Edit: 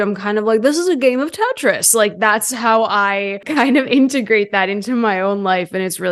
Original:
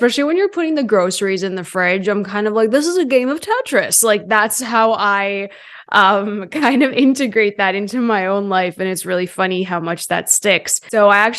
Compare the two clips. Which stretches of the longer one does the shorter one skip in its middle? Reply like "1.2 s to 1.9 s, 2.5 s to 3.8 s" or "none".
5.5 s to 6.5 s